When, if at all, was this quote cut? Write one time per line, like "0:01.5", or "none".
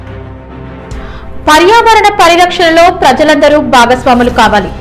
0:00.9